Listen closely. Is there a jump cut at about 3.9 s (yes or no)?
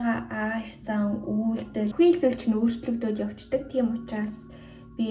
no